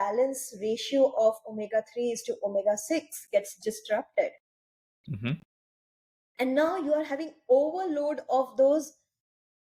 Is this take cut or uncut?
uncut